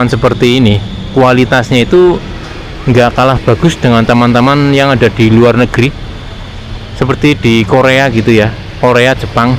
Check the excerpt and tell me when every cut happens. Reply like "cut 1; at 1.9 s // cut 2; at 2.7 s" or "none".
none